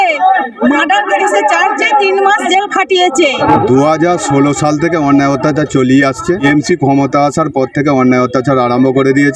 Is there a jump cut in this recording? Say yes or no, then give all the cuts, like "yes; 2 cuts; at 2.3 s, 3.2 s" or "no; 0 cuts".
yes; 2 cuts; at 3.4 s, 6.4 s